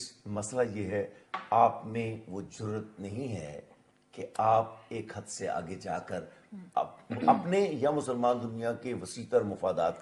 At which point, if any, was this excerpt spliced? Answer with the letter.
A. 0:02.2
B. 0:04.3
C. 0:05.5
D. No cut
D